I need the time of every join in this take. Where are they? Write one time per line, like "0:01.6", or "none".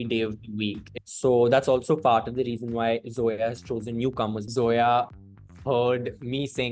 0:00.9
0:04.4